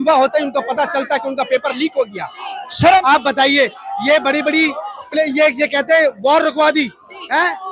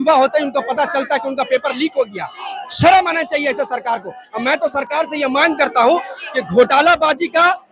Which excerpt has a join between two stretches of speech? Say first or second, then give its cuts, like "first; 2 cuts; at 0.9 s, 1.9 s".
first; 1 cut; at 3.0 s